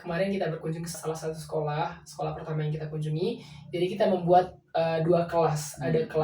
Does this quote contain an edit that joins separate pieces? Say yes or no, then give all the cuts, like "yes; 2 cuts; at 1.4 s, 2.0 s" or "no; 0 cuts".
yes; 1 cut; at 1.0 s